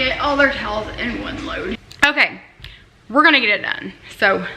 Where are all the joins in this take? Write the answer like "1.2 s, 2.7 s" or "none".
1.9 s

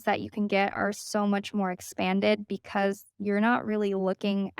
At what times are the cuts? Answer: 3.1 s

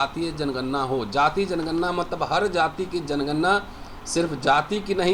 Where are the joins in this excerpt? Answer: none

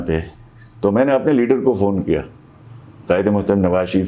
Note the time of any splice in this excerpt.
none

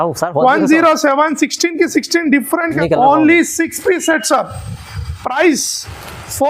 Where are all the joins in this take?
2.7 s

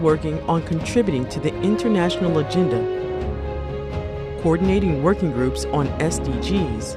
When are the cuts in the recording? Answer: 3.4 s

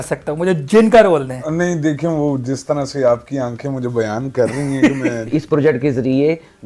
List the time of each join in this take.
5.3 s

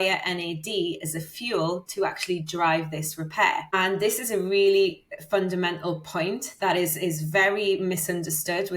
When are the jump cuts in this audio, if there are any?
3.7 s

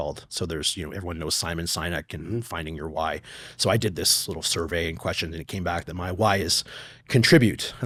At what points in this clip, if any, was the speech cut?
none

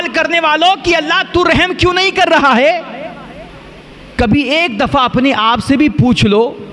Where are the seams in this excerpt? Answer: none

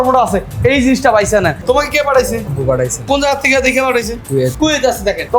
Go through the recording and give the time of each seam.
1.6 s, 2.6 s, 4.2 s

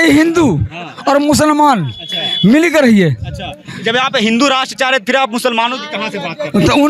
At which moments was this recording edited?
none

